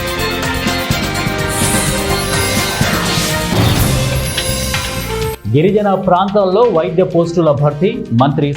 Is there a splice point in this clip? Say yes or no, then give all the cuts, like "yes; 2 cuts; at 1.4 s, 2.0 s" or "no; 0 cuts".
yes; 1 cut; at 5.4 s